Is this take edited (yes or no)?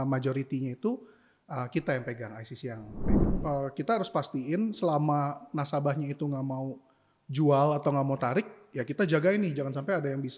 yes